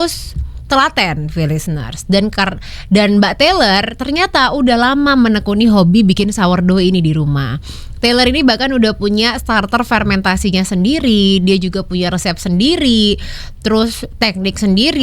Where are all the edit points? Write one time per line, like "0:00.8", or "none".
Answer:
none